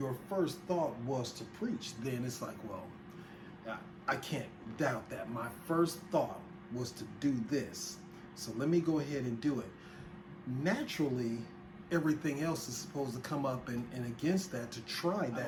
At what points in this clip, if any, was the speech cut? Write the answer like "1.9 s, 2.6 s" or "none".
none